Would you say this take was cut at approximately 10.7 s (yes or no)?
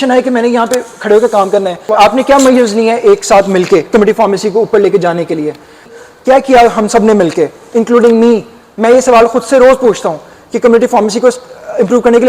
no